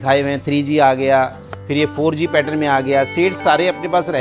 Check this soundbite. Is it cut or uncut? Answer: uncut